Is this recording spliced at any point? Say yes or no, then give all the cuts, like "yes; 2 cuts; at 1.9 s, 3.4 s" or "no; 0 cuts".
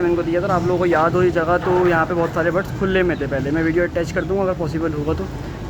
no; 0 cuts